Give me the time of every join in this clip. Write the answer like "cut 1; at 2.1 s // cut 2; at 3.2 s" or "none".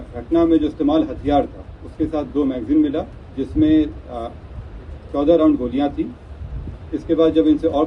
none

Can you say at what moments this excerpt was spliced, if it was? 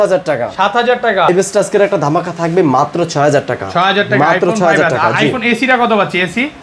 cut 1; at 1.3 s

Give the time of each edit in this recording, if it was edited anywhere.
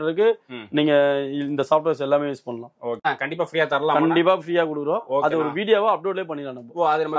cut 1; at 3.0 s

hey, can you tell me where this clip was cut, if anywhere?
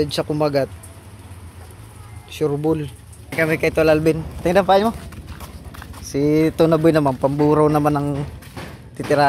cut 1; at 3.3 s

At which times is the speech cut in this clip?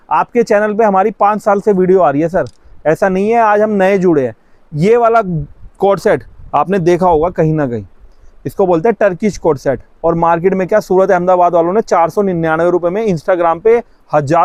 none

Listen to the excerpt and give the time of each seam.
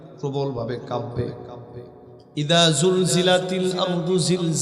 none

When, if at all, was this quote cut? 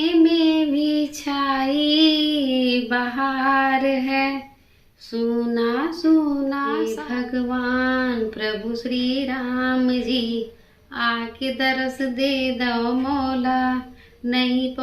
cut 1; at 6.7 s

